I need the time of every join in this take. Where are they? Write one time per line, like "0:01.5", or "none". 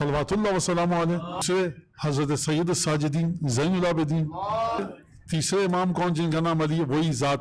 0:01.4
0:04.8